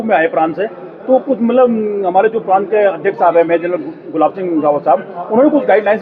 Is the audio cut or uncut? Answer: uncut